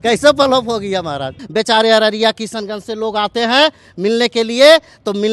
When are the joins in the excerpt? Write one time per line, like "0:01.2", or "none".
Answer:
0:01.4